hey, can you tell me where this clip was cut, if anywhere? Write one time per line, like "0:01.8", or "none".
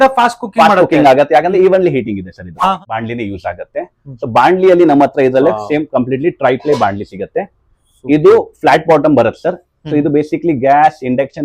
0:02.8